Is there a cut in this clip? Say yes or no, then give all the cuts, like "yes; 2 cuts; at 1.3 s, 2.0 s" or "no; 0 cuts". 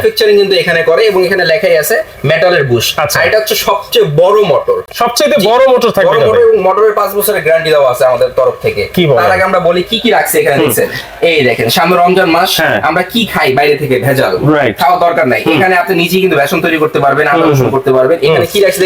no; 0 cuts